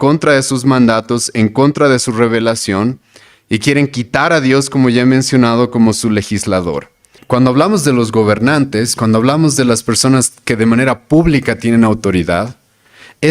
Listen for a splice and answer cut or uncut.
cut